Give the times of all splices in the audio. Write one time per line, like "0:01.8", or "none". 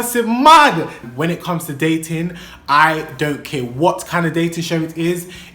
0:01.0